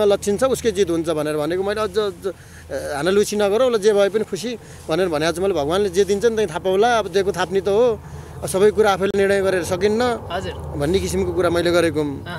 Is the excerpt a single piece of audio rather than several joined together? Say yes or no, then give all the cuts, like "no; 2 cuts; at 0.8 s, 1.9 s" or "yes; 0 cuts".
yes; 0 cuts